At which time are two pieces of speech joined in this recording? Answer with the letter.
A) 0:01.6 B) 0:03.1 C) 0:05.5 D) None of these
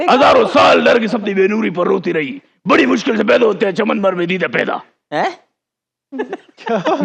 D